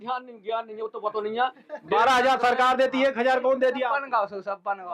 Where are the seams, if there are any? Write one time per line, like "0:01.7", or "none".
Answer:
none

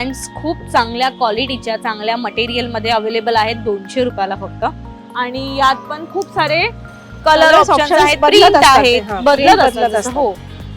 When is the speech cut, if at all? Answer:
none

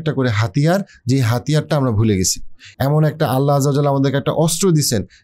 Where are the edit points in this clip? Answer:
none

